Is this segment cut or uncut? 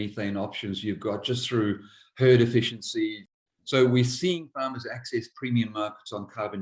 cut